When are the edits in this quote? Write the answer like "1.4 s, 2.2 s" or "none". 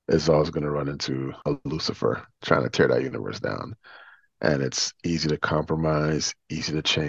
1.3 s, 2.3 s